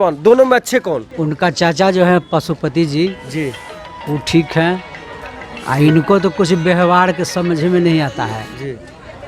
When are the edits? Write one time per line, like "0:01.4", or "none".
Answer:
0:01.1